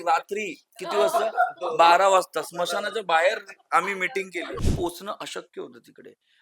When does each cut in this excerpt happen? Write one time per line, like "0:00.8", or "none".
0:04.6